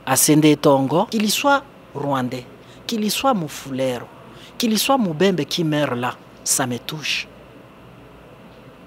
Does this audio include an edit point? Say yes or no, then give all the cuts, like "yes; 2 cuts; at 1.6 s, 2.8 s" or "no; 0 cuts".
yes; 1 cut; at 1.1 s